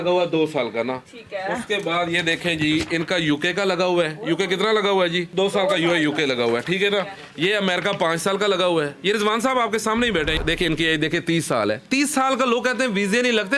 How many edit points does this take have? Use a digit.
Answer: 1